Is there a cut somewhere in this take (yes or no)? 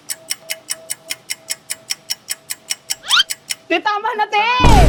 no